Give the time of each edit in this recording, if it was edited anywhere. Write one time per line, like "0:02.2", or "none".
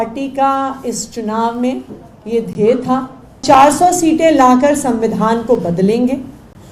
0:03.4